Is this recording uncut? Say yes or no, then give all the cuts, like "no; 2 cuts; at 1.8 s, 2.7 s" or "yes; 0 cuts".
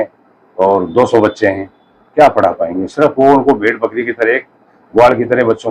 yes; 0 cuts